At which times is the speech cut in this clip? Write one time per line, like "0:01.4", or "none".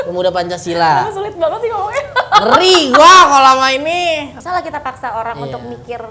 0:04.3